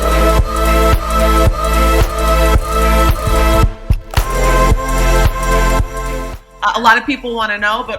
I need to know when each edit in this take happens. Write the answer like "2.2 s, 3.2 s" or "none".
5.9 s